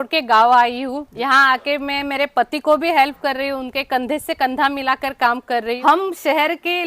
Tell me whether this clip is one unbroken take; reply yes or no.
no